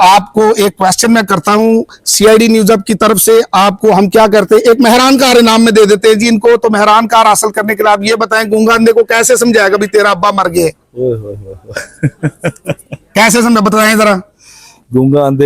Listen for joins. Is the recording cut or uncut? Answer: uncut